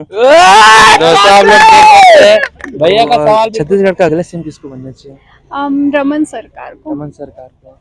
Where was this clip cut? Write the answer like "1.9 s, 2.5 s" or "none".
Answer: 3.5 s